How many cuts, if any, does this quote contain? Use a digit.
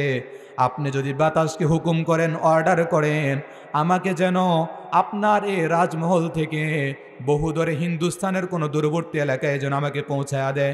0